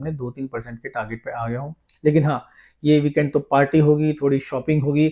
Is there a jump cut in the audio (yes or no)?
no